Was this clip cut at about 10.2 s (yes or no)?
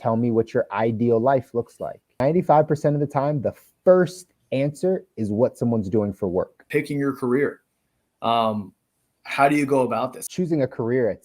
yes